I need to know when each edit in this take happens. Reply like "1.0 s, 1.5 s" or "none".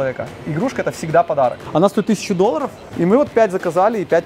1.6 s, 2.8 s